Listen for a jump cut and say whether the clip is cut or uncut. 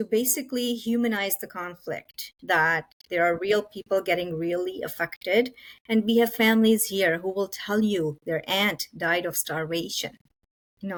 uncut